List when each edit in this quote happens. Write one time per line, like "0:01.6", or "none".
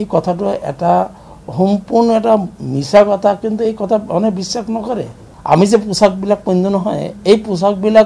0:05.3